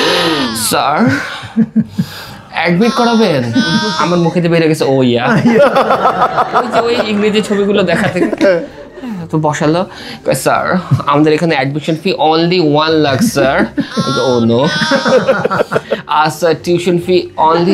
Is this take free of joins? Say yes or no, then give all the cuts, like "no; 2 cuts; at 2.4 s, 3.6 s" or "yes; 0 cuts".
yes; 0 cuts